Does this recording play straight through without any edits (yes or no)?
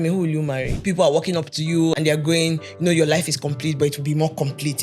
no